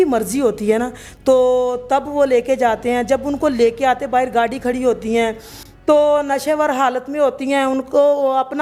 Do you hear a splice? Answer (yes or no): no